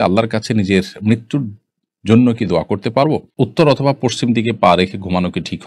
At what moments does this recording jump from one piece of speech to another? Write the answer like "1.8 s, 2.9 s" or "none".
3.4 s

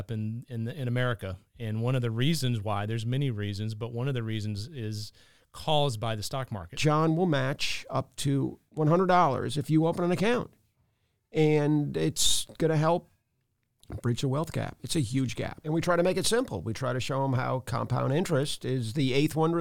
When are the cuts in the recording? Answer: 6.8 s, 8.6 s, 15.6 s

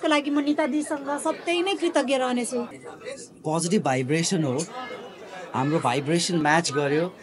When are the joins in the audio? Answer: 2.7 s

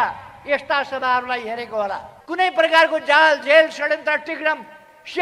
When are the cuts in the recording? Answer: 2.2 s

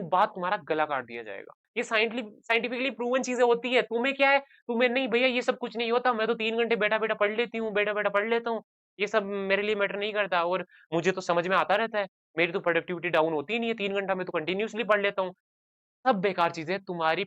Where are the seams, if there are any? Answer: 1.7 s

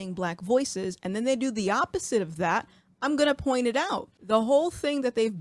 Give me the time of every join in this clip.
4.1 s

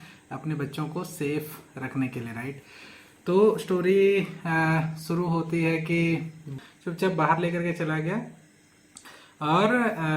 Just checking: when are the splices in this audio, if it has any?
6.5 s

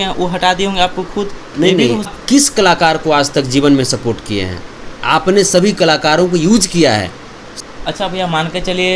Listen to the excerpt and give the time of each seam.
2.1 s, 7.5 s

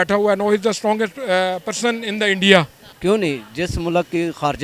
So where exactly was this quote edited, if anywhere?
2.8 s

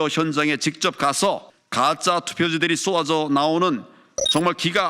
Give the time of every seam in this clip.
1.6 s

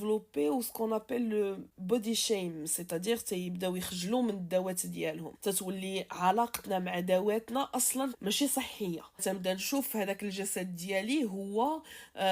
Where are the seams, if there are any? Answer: 1.7 s, 5.3 s, 8.2 s, 9.2 s

